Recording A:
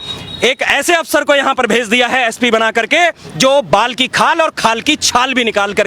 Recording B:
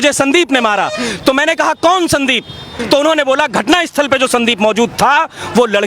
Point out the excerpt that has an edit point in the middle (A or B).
B